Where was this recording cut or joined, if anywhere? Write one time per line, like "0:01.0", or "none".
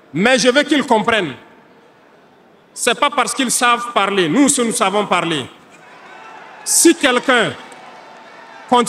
none

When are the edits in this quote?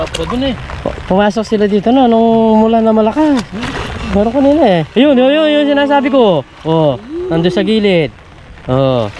0:03.6

